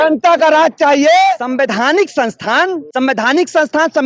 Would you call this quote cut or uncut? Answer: cut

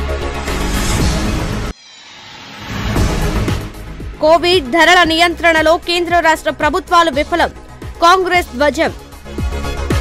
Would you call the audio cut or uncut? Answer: uncut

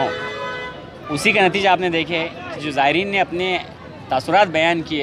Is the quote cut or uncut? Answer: uncut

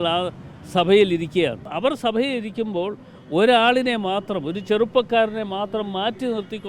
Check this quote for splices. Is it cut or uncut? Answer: cut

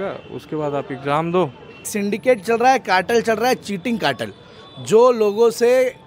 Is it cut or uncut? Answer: cut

